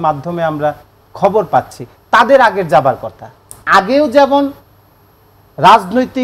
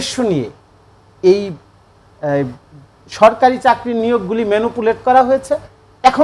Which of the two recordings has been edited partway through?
first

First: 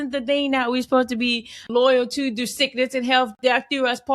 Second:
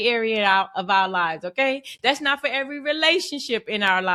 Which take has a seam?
first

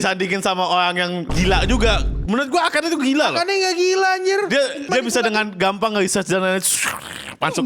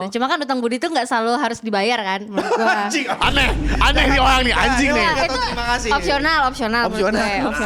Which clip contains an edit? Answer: first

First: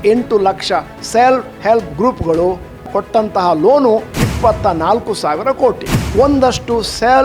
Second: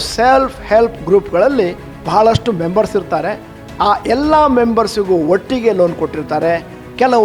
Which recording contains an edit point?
first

